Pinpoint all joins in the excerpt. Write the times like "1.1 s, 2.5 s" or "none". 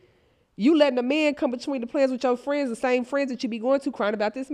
2.3 s